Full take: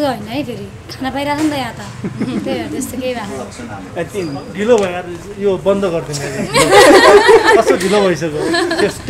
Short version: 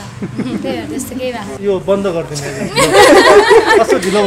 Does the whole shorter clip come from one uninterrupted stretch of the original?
no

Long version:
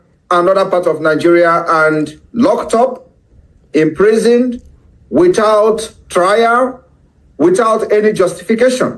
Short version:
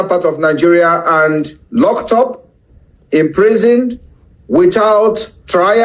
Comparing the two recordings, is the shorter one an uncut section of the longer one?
yes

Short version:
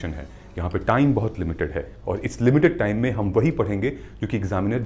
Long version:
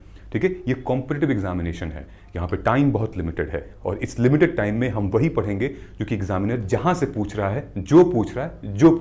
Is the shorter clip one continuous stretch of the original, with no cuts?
yes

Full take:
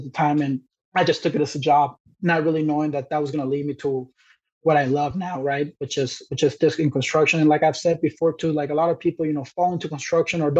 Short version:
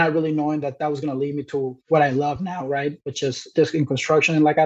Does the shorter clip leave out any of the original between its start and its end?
yes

